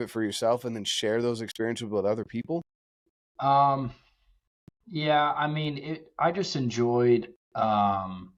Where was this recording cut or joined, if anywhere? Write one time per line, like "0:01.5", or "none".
none

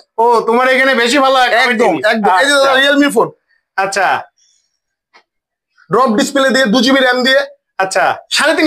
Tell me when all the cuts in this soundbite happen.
none

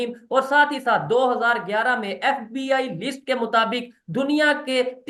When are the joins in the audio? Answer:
none

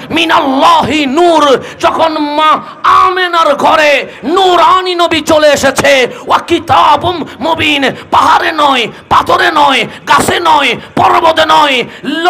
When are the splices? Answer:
none

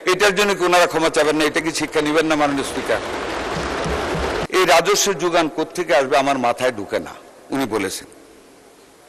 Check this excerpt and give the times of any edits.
0:04.5

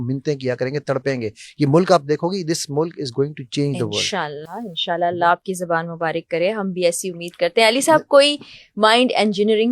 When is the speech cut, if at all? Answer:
none

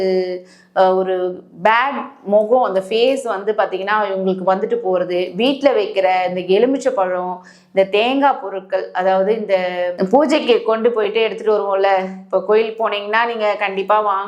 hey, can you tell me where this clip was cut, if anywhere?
none

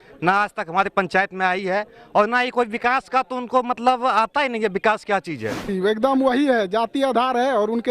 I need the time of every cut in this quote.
0:05.7

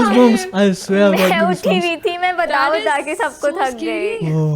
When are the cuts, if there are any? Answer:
none

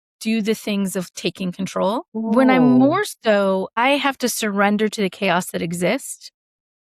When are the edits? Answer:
0:02.3
0:03.8

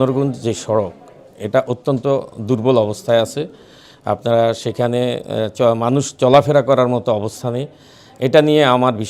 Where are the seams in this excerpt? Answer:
none

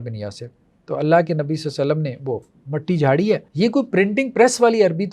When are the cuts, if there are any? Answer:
none

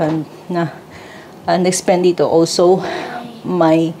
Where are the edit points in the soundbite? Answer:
none

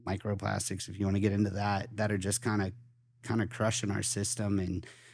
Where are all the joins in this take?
none

